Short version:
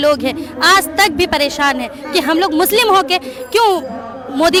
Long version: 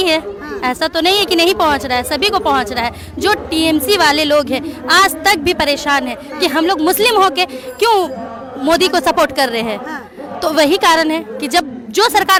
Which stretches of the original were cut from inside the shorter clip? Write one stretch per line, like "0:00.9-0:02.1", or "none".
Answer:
none